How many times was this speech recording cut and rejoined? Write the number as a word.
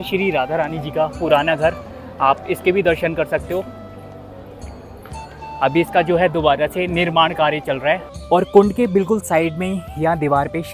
one